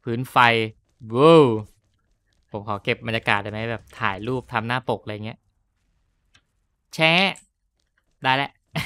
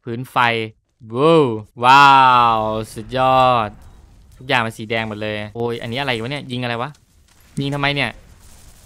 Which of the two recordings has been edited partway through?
second; 2 cuts; at 1.7 s, 5.5 s

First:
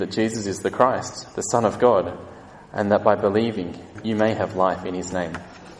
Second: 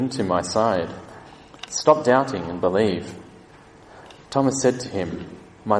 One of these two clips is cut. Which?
first; 1 cut; at 3.9 s

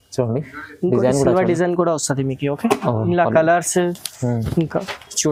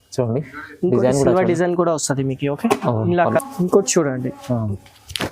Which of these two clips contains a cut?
second; 1 cut; at 3.4 s

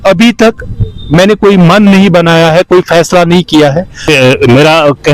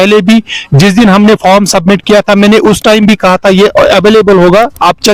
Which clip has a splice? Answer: first; 1 cut; at 3.9 s

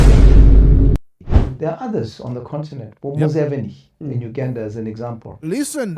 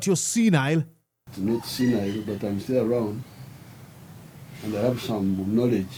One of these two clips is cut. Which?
first; 1 cut; at 1.2 s

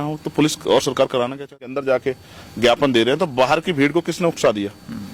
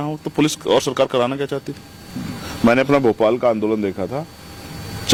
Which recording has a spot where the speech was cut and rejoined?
first; 1 cut; at 1.7 s

